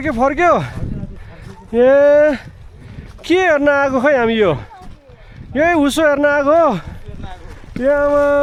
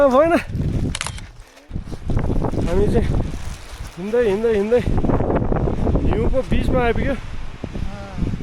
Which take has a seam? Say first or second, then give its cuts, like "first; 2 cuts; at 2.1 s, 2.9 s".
second; 1 cut; at 1.8 s